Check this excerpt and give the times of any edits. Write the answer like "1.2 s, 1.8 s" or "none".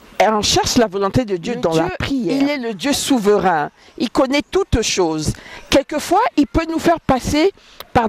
2.3 s